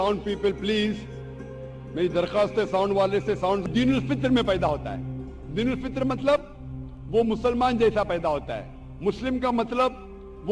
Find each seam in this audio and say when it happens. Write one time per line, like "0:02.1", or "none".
0:03.7